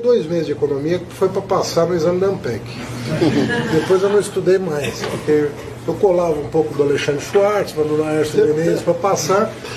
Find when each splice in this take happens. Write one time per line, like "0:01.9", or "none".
none